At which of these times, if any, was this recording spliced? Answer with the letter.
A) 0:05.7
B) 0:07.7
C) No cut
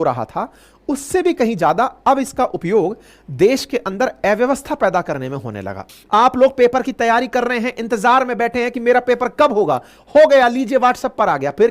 A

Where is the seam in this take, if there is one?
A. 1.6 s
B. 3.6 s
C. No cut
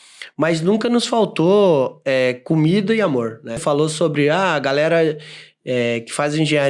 B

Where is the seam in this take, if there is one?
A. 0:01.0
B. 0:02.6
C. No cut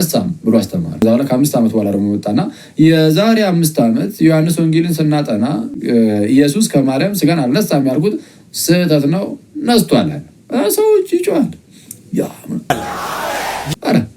A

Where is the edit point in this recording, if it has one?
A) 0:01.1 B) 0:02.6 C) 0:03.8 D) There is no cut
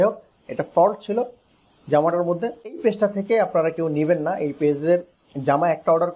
B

